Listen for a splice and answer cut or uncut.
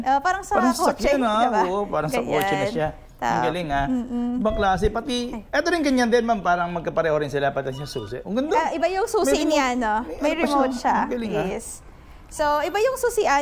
uncut